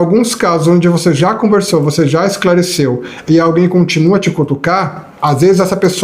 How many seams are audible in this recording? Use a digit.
1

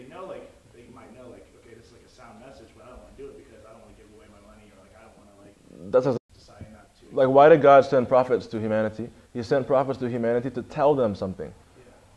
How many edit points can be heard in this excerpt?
0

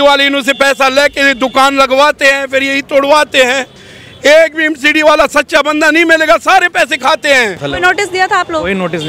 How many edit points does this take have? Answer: 1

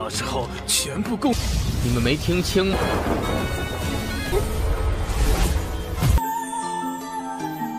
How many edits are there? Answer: 1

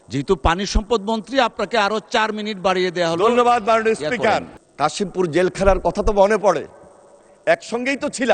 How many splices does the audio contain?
1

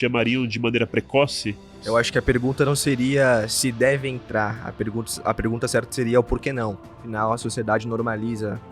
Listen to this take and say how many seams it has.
2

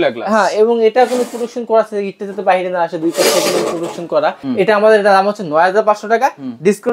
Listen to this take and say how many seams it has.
1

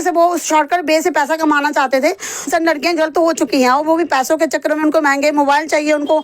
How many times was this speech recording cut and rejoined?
1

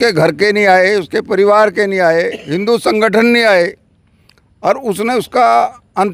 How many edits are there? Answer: 0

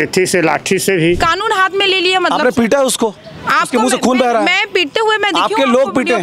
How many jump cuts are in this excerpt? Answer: 1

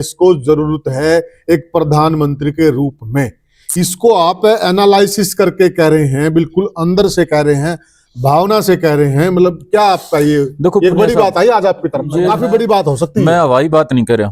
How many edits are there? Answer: 0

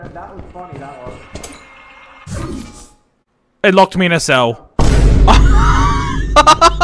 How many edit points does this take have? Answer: 0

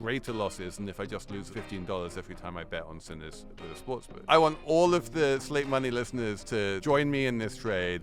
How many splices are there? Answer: 3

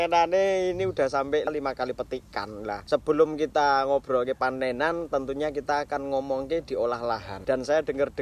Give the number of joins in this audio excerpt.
0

